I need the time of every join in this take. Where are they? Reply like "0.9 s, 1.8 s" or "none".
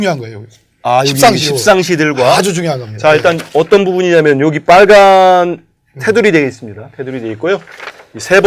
7.4 s